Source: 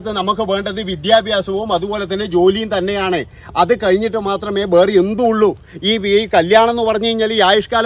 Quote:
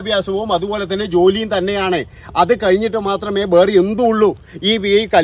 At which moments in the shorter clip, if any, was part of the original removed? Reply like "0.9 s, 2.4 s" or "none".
none